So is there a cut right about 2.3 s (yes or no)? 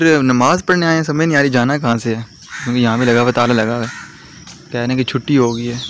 no